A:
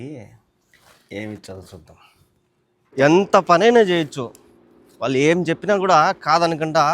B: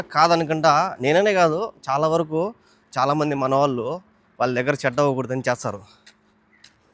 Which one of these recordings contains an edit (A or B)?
A